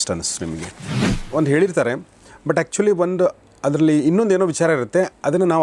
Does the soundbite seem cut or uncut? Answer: cut